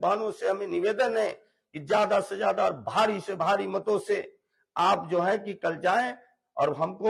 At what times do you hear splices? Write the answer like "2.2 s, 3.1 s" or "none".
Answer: none